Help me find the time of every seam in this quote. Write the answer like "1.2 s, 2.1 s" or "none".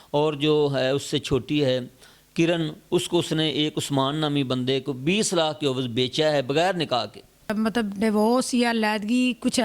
7.5 s